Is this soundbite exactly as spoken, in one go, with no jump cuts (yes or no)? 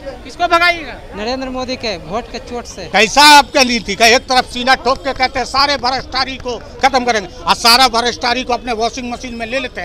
no